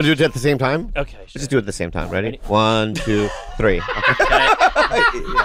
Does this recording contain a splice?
no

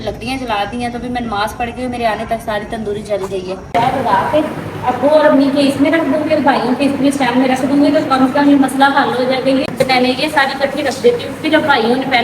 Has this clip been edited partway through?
yes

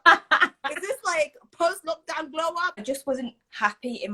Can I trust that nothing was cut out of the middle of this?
no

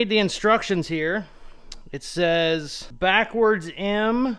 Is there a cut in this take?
no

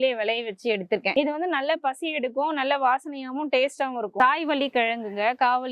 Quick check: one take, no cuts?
no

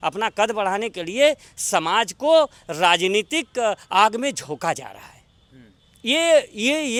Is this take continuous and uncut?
yes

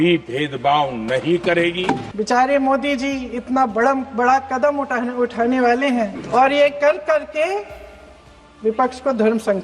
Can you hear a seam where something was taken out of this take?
yes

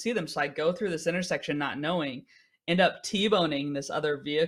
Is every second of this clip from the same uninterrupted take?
yes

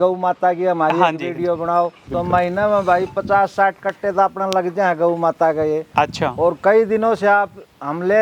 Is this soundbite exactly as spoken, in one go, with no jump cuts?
no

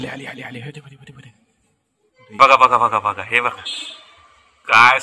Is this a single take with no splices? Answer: no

